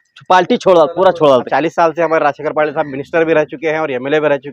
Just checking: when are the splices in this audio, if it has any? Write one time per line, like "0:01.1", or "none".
0:01.5